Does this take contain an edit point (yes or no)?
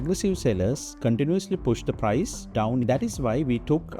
yes